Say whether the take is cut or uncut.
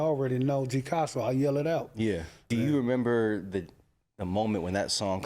cut